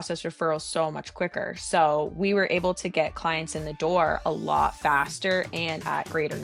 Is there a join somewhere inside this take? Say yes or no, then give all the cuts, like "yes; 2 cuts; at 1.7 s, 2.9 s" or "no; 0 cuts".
no; 0 cuts